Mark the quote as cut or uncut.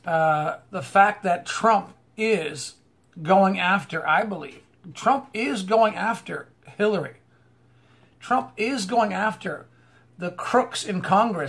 cut